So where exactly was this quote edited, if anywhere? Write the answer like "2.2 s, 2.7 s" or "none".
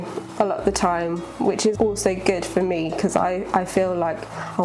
1.7 s